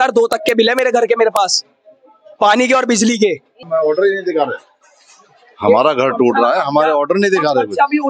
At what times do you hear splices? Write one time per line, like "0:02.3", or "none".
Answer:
0:03.6